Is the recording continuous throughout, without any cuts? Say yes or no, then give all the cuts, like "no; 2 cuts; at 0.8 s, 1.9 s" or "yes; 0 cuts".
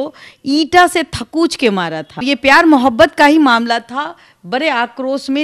no; 1 cut; at 2.2 s